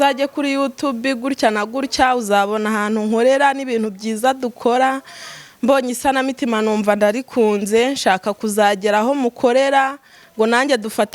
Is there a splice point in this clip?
no; 0 cuts

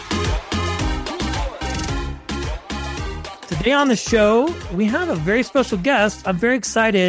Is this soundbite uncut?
no; 1 cut; at 3.4 s

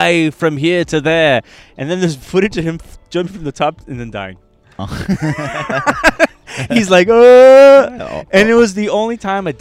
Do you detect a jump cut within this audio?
no; 0 cuts

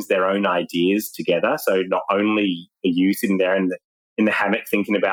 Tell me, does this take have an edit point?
no; 0 cuts

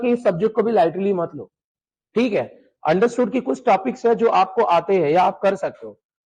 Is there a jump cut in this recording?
no; 0 cuts

